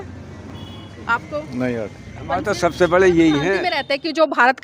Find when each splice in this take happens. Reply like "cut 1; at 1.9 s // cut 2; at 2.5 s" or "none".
cut 1; at 3.7 s